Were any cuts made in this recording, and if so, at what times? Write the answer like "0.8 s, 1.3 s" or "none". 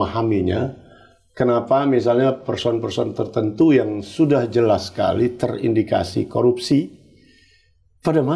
none